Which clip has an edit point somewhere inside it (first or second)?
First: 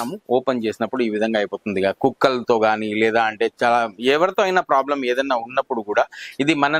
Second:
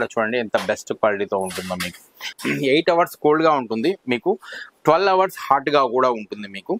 second